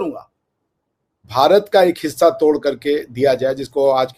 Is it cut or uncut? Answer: cut